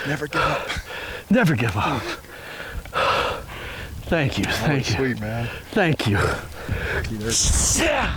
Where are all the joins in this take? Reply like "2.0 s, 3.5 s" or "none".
none